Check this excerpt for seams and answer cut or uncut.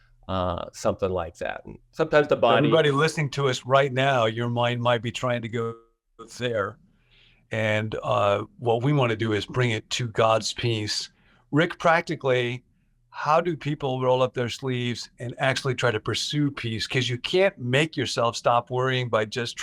uncut